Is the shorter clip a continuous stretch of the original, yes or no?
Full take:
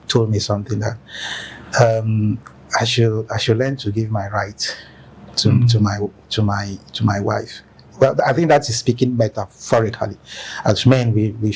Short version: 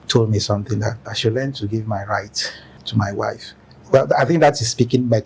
no